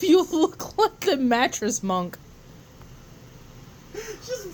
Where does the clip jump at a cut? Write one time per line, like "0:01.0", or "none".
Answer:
none